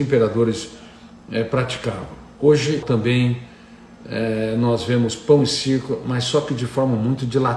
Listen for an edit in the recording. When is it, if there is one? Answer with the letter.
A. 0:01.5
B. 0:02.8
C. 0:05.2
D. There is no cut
B